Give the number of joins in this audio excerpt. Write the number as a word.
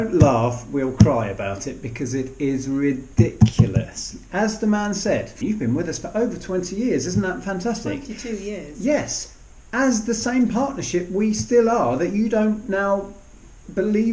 one